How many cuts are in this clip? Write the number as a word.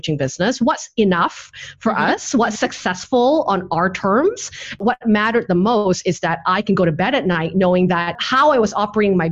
two